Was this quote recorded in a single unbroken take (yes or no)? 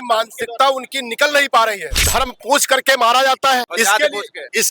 no